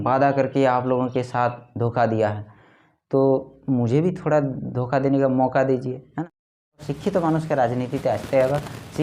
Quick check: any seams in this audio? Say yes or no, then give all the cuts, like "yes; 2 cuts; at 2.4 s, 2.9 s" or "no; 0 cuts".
yes; 1 cut; at 6.5 s